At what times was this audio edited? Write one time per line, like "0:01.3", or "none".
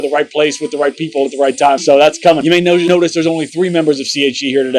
0:02.4